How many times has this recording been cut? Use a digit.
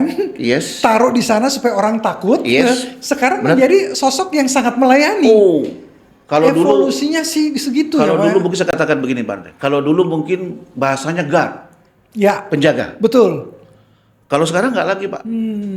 0